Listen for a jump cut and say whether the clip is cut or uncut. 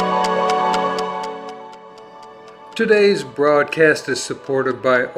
cut